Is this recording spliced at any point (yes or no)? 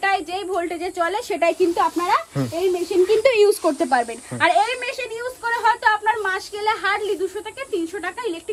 no